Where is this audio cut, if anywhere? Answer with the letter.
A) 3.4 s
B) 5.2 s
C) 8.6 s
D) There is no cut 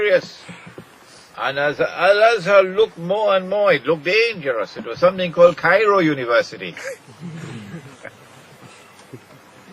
B